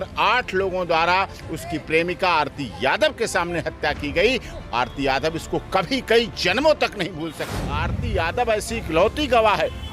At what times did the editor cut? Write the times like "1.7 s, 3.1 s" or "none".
7.5 s